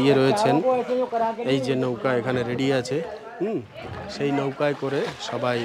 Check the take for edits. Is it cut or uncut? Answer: uncut